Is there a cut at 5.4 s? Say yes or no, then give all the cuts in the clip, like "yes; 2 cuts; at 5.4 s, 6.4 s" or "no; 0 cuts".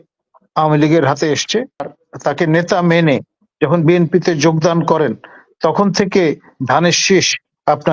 no; 1 cut; at 2.0 s